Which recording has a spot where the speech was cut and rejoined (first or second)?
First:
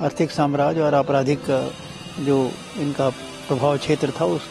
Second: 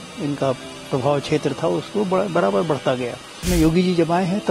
second